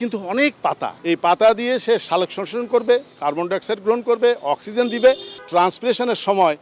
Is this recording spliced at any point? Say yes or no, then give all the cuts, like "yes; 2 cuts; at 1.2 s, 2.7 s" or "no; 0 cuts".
yes; 2 cuts; at 0.9 s, 5.3 s